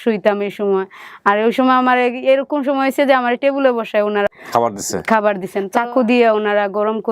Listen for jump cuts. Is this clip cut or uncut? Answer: cut